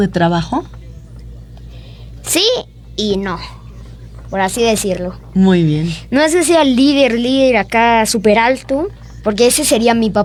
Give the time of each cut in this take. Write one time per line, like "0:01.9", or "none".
none